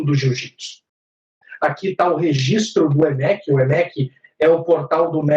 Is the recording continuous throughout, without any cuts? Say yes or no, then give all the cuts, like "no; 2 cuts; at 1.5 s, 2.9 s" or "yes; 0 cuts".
no; 1 cut; at 1.3 s